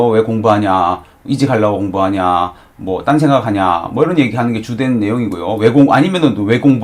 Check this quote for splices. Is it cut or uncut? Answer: uncut